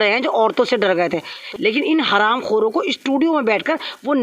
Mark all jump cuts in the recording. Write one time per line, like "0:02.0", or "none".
0:01.4